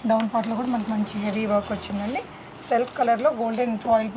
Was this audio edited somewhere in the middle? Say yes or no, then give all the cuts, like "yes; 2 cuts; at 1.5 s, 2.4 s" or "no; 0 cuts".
no; 0 cuts